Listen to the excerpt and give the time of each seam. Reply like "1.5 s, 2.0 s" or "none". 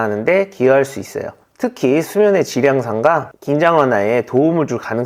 1.4 s

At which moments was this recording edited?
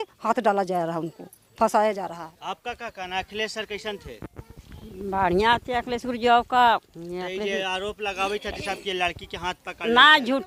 none

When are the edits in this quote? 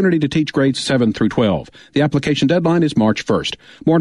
none

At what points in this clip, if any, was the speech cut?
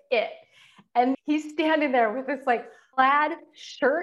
1.1 s

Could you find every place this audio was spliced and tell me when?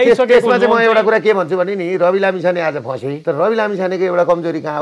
3.1 s

